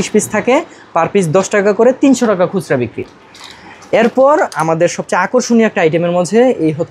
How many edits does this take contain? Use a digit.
0